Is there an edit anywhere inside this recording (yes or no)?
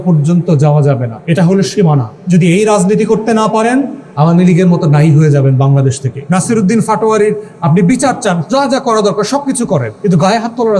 yes